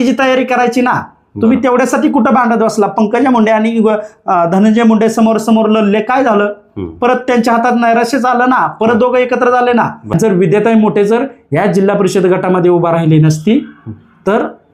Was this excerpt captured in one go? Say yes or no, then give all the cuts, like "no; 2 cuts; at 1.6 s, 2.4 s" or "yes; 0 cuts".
no; 1 cut; at 10.1 s